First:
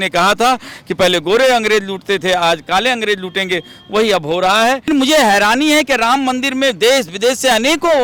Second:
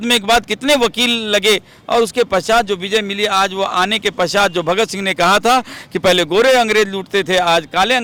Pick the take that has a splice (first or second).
first